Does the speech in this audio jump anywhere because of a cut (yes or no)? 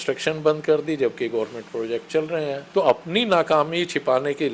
yes